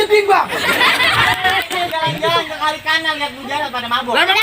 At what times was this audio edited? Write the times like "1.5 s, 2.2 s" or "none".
1.9 s